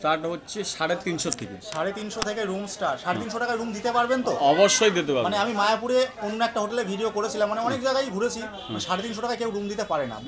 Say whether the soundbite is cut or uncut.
uncut